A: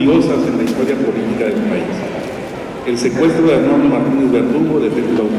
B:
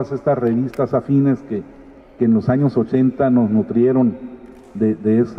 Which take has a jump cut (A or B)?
B